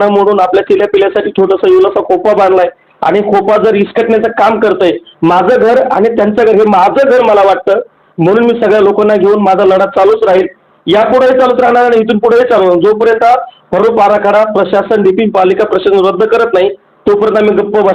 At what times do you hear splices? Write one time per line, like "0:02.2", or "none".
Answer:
none

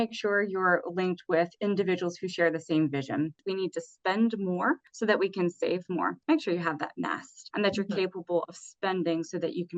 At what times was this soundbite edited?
0:03.4
0:06.2

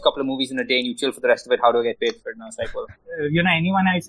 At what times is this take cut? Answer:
0:03.0

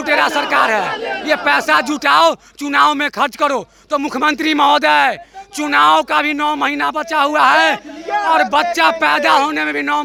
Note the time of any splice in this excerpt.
none

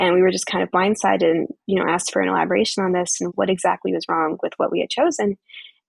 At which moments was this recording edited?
0:03.3

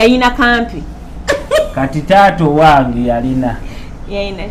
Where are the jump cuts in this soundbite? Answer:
none

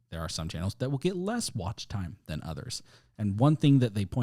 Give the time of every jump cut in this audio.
none

